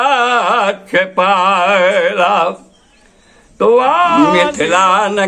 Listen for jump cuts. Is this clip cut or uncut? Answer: cut